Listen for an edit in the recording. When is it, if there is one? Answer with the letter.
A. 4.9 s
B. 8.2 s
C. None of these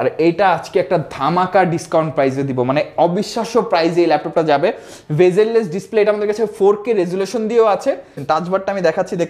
B